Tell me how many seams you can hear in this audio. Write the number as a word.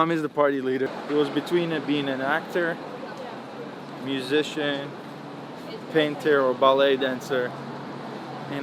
one